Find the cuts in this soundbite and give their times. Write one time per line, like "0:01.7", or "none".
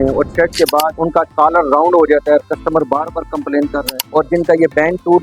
0:00.9
0:03.9